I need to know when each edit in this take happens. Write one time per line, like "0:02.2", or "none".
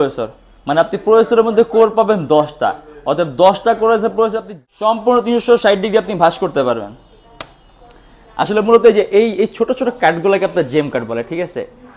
0:04.5